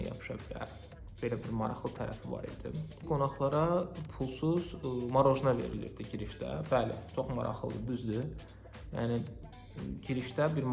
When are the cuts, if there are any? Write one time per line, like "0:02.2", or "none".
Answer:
0:03.1